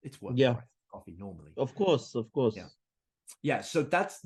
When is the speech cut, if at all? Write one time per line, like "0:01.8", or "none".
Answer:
none